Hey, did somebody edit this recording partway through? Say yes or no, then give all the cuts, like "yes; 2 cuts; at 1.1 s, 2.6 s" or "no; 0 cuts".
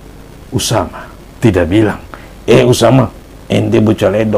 no; 0 cuts